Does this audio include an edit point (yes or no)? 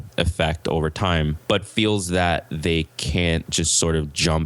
yes